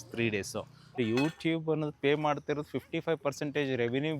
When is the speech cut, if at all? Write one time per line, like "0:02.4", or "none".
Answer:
0:01.0